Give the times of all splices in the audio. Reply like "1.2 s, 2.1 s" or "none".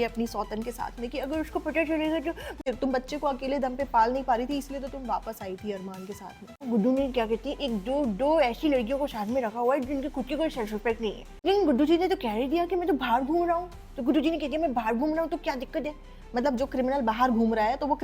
2.6 s, 6.6 s, 11.4 s